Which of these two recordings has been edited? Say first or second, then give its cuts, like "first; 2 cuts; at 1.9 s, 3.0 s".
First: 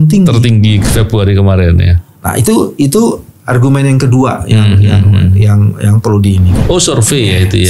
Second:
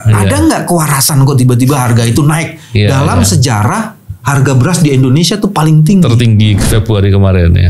first; 1 cut; at 6.5 s